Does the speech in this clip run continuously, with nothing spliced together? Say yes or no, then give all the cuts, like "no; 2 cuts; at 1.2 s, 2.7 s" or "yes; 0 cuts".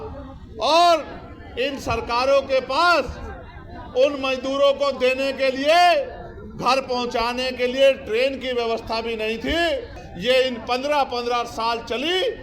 no; 1 cut; at 10.0 s